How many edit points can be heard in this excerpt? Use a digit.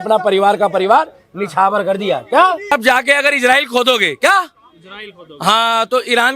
1